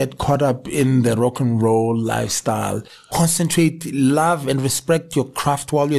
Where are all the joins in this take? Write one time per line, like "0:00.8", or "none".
0:03.0